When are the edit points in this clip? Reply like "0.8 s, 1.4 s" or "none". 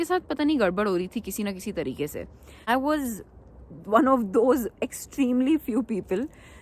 2.7 s

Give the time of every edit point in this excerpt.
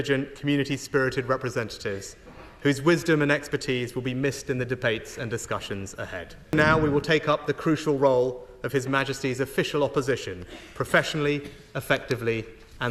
6.5 s

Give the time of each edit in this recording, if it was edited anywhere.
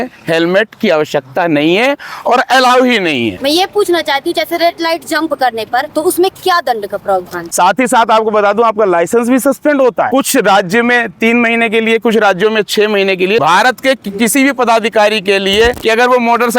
3.4 s, 5.9 s, 7.5 s, 13.4 s

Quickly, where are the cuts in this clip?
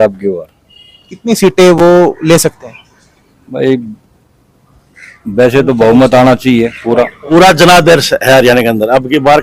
7.2 s

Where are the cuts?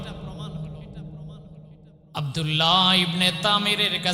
1.7 s

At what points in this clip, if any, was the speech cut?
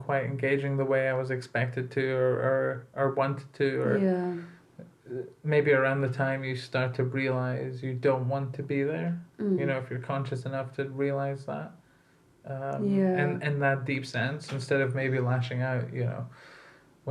none

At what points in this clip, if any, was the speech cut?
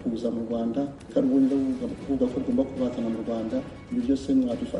1.0 s, 3.8 s

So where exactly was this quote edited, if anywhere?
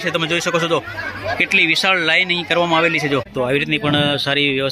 3.3 s

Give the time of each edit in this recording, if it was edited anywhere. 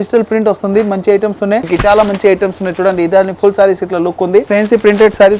1.6 s, 4.5 s

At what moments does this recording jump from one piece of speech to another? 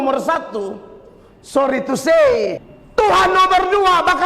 2.6 s

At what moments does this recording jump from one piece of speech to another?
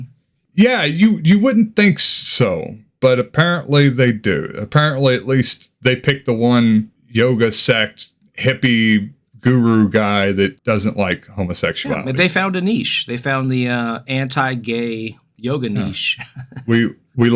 none

